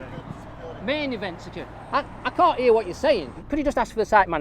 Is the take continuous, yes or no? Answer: no